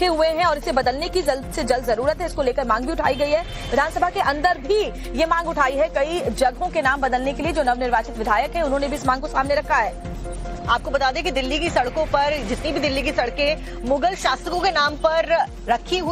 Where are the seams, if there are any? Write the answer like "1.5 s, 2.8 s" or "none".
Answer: none